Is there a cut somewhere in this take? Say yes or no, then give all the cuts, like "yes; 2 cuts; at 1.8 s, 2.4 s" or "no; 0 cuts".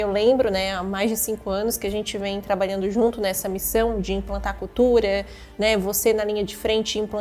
no; 0 cuts